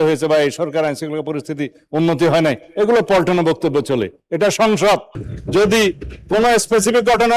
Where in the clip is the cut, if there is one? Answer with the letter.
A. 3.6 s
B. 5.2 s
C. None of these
B